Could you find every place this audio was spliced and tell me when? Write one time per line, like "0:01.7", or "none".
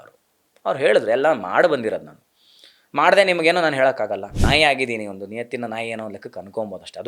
0:04.3